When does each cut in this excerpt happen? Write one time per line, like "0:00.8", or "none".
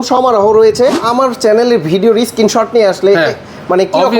0:01.0